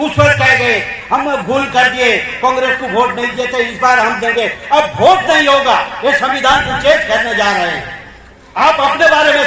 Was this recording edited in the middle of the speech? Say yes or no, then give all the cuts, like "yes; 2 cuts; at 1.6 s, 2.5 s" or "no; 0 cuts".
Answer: no; 0 cuts